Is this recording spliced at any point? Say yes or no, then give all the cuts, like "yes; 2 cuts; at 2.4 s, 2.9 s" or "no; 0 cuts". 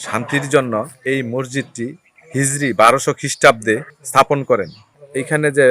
yes; 3 cuts; at 0.9 s, 4.0 s, 4.8 s